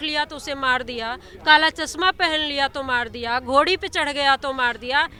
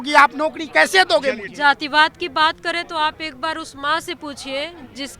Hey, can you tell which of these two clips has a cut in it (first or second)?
second